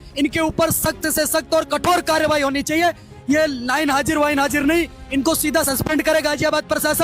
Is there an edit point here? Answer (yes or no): yes